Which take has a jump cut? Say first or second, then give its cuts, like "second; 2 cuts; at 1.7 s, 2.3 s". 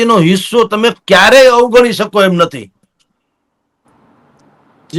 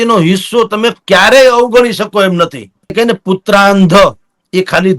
second; 1 cut; at 2.9 s